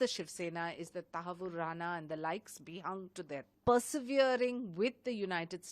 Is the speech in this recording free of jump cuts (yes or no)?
no